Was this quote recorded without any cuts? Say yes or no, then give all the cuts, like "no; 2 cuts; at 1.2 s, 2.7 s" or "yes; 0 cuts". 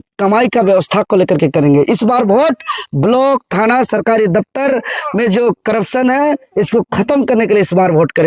yes; 0 cuts